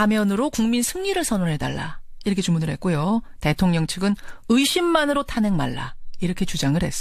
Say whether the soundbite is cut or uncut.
uncut